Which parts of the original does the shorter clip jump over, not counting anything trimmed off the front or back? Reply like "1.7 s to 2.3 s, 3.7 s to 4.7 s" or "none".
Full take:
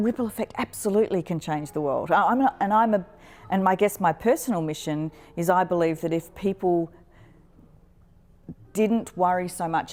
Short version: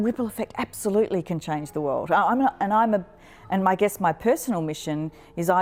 none